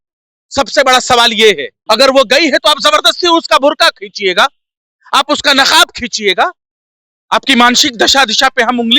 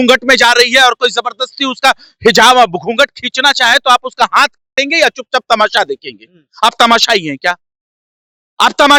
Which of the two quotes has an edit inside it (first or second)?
first